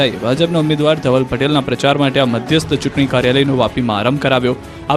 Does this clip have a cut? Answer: no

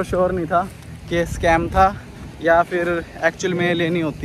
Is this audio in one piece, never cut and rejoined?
yes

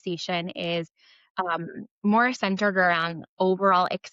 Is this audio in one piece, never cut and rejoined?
yes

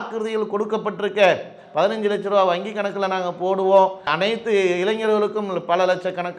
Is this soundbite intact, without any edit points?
yes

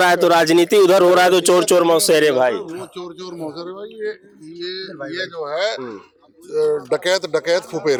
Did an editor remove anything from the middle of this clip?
no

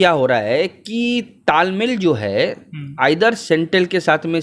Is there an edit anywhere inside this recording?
no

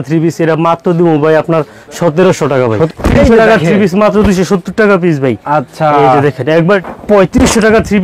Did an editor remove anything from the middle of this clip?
yes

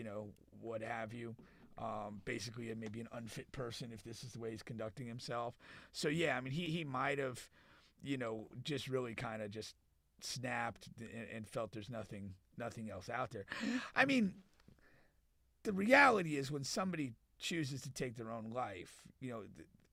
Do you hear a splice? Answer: no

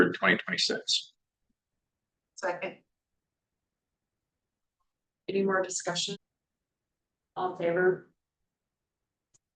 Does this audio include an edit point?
yes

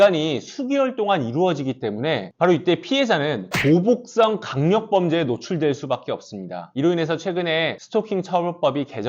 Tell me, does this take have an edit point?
yes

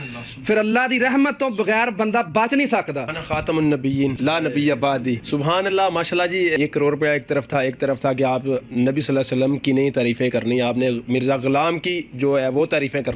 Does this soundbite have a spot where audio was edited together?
yes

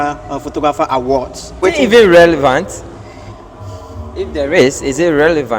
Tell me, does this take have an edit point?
yes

